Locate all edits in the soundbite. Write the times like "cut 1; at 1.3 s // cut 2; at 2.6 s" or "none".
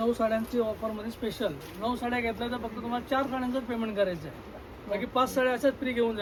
none